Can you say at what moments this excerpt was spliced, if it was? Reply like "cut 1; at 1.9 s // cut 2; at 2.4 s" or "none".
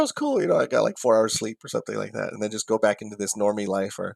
none